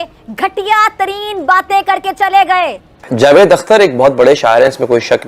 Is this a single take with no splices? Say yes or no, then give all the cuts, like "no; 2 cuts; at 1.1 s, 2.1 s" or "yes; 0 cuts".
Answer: no; 1 cut; at 2.9 s